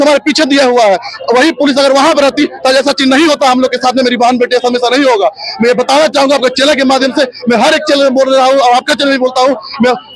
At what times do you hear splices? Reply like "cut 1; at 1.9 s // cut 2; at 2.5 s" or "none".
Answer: none